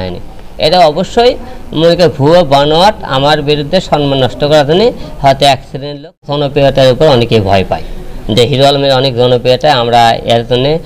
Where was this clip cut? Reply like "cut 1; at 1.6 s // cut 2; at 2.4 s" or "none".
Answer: cut 1; at 6.2 s